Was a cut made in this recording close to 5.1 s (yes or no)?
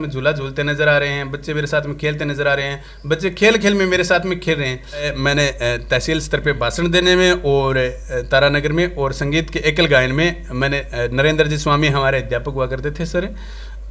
yes